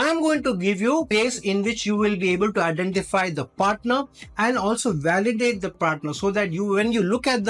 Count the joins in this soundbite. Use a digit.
1